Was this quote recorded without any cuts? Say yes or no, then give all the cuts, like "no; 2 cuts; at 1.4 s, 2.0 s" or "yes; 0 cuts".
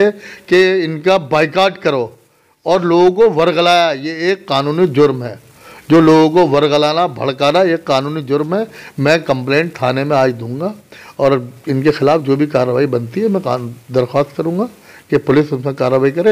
yes; 0 cuts